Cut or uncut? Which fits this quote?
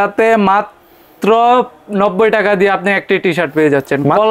uncut